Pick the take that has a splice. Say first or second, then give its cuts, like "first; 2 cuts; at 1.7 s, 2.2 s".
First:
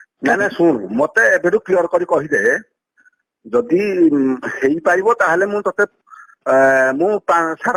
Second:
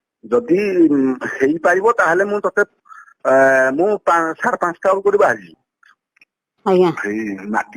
second; 1 cut; at 5.6 s